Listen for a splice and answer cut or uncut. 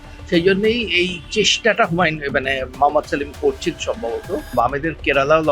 cut